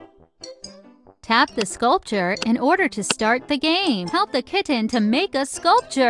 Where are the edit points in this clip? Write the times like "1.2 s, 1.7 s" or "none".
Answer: 4.1 s